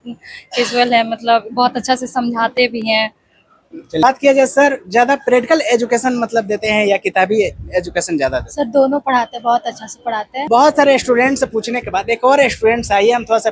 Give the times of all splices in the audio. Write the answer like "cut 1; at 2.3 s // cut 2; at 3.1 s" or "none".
cut 1; at 4.0 s // cut 2; at 10.4 s